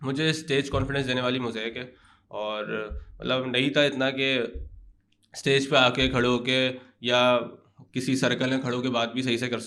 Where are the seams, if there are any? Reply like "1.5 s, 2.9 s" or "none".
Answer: none